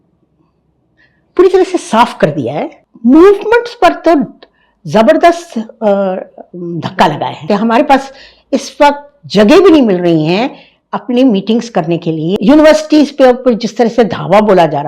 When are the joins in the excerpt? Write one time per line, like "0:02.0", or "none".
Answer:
0:02.8
0:07.4
0:12.3